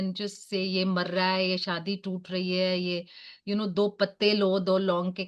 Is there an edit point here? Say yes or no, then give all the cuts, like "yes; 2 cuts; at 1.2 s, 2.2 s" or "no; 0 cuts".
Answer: no; 0 cuts